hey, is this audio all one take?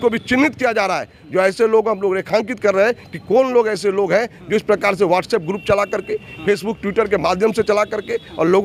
yes; 0 cuts

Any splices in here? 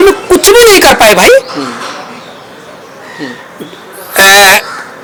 no; 0 cuts

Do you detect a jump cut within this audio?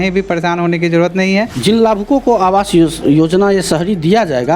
yes; 1 cut; at 1.5 s

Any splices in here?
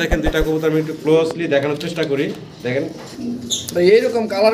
yes; 1 cut; at 3.1 s

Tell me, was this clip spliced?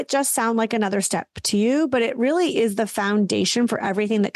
no; 0 cuts

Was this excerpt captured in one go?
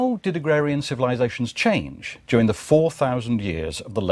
yes; 0 cuts

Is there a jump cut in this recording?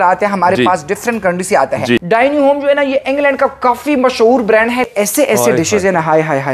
yes; 2 cuts; at 2.0 s, 4.9 s

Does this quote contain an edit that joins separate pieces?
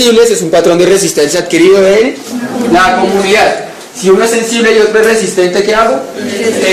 no; 0 cuts

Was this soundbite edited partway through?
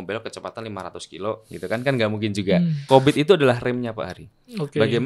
yes; 1 cut; at 2.8 s

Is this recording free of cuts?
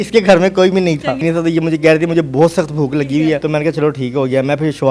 no; 2 cuts; at 1.2 s, 3.4 s

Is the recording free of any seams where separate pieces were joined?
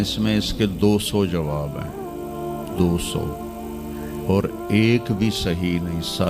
yes; 0 cuts

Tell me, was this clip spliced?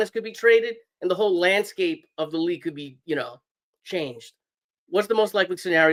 no; 0 cuts

